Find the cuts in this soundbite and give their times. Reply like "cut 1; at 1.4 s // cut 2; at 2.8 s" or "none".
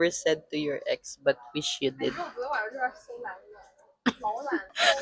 none